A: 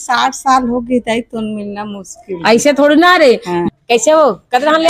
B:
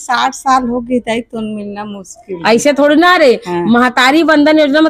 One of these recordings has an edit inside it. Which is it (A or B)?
A